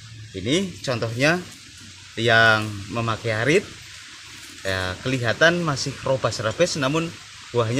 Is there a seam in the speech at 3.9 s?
no; 0 cuts

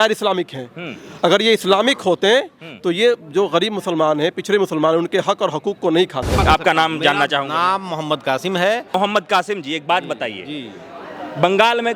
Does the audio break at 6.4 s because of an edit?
yes; 2 cuts; at 6.4 s, 8.9 s

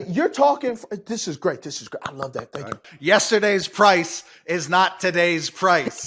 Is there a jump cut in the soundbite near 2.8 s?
yes; 1 cut; at 2.8 s

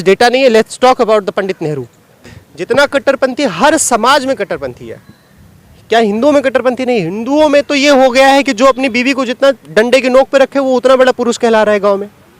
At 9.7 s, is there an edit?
no; 1 cut; at 2.4 s

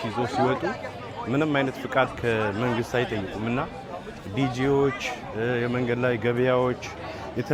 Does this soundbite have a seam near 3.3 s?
no; 0 cuts

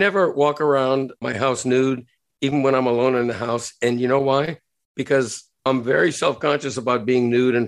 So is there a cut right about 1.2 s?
yes; 1 cut; at 1.2 s

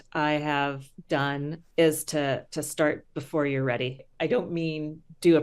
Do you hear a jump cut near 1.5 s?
yes; 2 cuts; at 1.5 s, 4.0 s

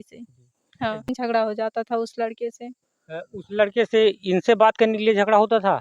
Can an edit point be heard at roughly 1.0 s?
yes; 1 cut; at 1.0 s

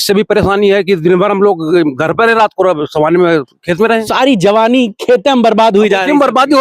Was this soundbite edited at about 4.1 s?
yes; 1 cut; at 4.1 s

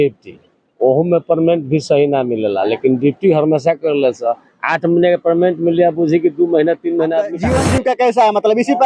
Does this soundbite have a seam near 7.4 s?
yes; 1 cut; at 7.4 s

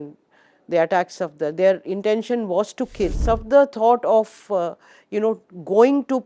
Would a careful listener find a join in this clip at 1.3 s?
no; 1 cut; at 3.2 s

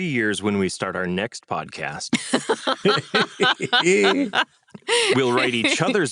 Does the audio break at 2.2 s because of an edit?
no; 0 cuts

